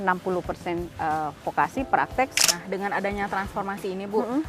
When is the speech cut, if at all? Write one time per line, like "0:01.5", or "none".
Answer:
0:02.3